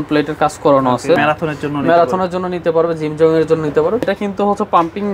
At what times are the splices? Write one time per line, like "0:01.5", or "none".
0:01.2
0:04.1

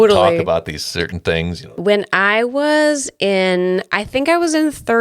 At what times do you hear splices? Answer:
0:01.7

